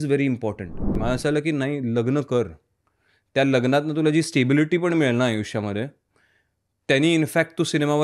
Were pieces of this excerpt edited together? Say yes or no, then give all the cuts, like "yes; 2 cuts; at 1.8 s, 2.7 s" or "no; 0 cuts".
yes; 1 cut; at 0.9 s